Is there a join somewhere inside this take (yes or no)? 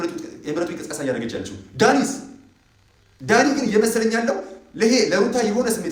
no